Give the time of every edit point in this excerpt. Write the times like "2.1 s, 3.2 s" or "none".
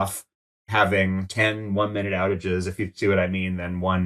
1.3 s